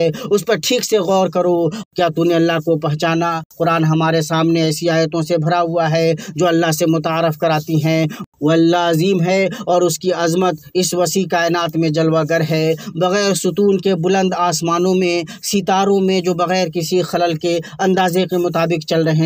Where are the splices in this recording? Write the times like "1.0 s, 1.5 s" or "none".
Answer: 1.8 s, 3.5 s, 8.2 s